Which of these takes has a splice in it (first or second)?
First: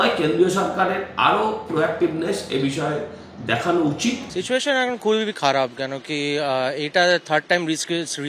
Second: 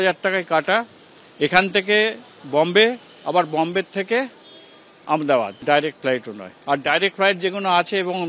first